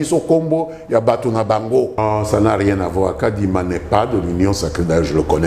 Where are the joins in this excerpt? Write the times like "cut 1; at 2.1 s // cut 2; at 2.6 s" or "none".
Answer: cut 1; at 2.0 s